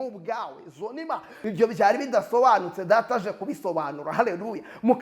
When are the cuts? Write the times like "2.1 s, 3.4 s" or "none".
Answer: 1.3 s